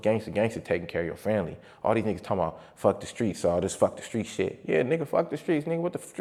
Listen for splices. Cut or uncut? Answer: uncut